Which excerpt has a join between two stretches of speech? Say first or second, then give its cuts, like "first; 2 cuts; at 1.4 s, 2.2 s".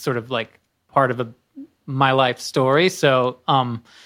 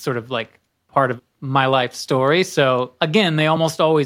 second; 2 cuts; at 1.3 s, 2.9 s